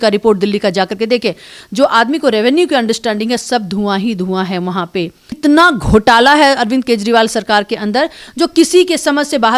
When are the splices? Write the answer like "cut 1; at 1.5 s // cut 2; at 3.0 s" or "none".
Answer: cut 1; at 5.4 s